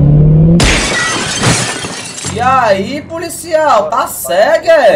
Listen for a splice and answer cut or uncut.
uncut